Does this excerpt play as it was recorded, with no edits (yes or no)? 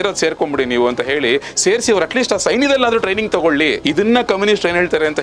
no